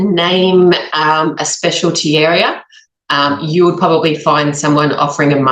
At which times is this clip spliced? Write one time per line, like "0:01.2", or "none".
none